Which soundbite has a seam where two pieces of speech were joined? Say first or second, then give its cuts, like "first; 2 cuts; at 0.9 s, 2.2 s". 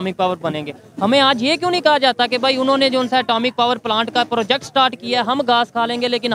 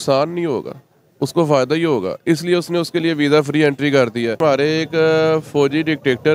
second; 1 cut; at 4.4 s